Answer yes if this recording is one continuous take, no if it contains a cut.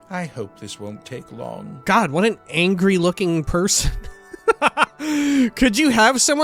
yes